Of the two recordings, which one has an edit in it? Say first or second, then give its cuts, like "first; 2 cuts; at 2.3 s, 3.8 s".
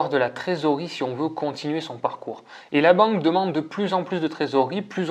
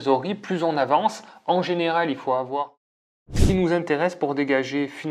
second; 1 cut; at 3.4 s